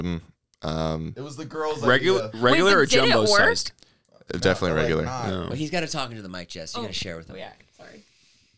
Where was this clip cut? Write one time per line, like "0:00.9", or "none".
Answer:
none